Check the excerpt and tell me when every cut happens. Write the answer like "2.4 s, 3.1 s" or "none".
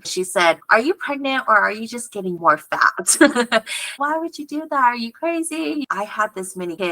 3.9 s, 5.9 s